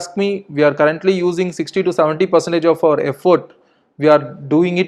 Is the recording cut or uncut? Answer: uncut